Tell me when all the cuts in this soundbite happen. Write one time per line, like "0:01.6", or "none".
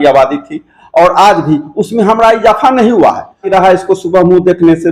0:03.4